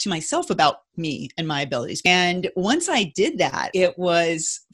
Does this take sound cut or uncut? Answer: cut